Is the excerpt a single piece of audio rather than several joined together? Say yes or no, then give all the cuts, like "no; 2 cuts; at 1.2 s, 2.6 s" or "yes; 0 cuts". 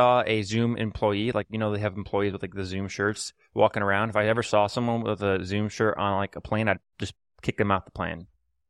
yes; 0 cuts